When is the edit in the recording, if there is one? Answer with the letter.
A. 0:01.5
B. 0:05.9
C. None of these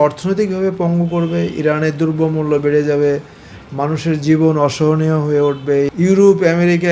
B